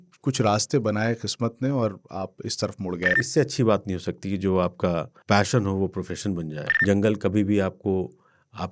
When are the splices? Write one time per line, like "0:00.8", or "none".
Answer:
0:03.1
0:05.1
0:06.6